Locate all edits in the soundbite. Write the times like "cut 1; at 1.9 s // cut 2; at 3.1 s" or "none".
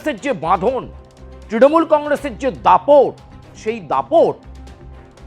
cut 1; at 4.4 s